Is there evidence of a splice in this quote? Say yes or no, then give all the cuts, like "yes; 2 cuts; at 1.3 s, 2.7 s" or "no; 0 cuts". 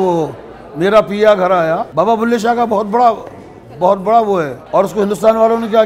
yes; 2 cuts; at 1.9 s, 4.6 s